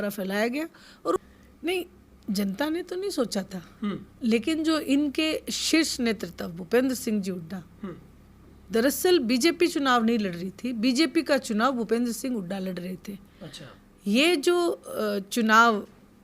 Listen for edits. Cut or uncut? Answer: cut